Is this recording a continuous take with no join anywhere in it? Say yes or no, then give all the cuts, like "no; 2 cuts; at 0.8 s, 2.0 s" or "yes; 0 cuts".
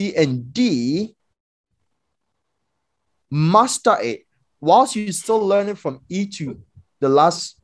yes; 0 cuts